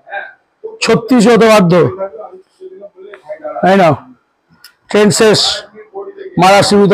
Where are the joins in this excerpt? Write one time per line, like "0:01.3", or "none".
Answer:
none